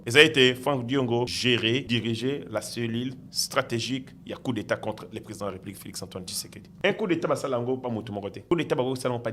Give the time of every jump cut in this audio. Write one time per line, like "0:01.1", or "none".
0:01.7
0:06.7
0:08.4